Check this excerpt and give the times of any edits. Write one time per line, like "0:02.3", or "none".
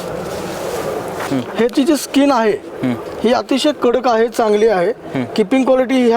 0:01.2